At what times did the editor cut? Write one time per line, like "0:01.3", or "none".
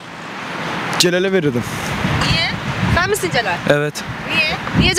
none